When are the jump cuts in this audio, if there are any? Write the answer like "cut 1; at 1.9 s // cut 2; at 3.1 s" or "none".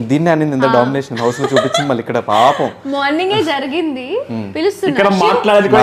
none

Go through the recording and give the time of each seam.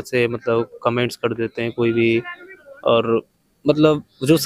none

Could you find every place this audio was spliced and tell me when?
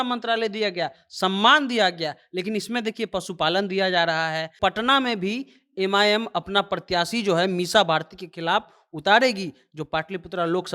cut 1; at 4.5 s

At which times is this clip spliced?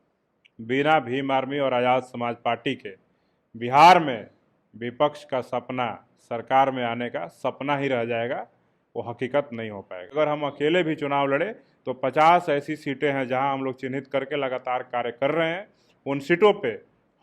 cut 1; at 10.1 s

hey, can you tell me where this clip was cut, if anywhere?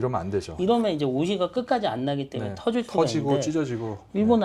none

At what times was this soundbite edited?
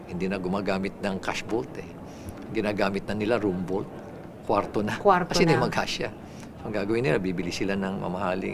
none

